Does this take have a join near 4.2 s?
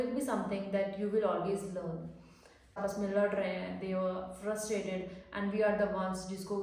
no; 1 cut; at 2.8 s

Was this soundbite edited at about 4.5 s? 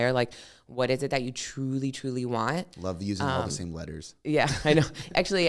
no; 0 cuts

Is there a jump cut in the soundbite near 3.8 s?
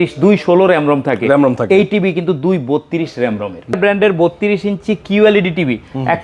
yes; 1 cut; at 3.8 s

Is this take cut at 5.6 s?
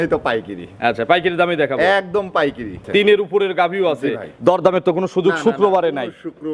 no; 1 cut; at 2.7 s

